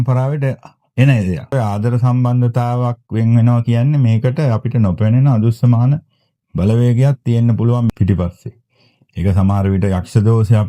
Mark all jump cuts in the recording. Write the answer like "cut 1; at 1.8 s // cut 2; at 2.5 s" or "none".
cut 1; at 1.5 s // cut 2; at 7.9 s